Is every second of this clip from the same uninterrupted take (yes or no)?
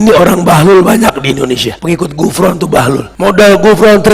no